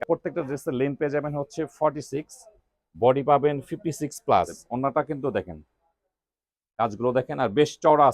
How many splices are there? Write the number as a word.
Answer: one